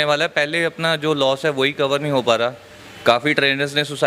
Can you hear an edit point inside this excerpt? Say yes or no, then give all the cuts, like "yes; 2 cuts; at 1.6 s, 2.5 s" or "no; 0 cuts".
no; 0 cuts